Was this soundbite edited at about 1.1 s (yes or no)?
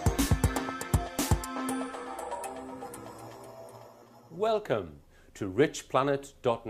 no